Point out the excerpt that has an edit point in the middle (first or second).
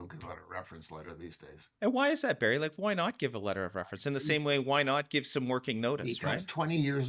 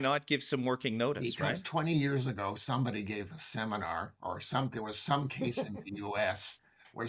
first